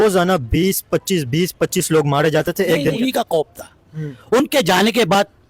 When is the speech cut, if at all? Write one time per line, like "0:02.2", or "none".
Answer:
0:03.0